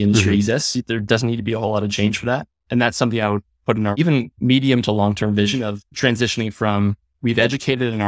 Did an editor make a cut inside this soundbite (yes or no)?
yes